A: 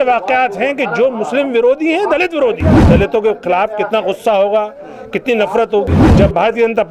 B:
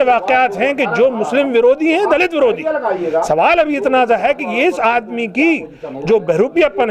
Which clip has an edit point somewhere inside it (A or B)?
A